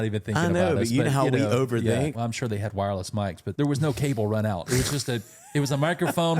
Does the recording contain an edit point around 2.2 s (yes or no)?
yes